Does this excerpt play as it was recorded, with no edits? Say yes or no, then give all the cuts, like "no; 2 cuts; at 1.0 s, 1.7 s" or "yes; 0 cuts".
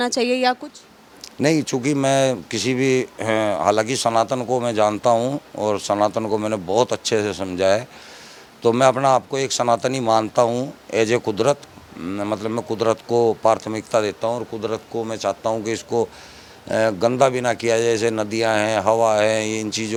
yes; 0 cuts